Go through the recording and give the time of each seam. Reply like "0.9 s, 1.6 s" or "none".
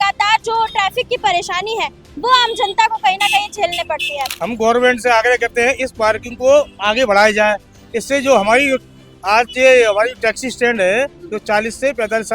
4.3 s